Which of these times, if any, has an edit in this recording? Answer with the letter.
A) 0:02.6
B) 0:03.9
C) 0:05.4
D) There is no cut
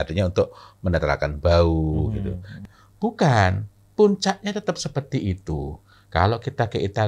A